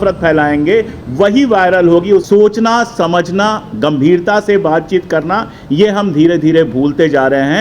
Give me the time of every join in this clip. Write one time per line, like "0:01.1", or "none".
0:02.2